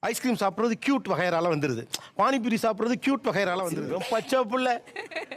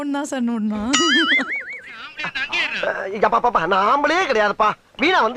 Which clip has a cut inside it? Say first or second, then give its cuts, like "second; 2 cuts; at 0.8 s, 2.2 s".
first; 1 cut; at 3.8 s